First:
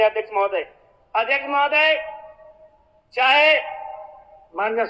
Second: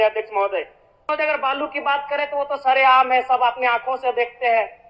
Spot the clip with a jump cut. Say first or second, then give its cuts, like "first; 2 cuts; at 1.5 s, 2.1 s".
second; 1 cut; at 1.1 s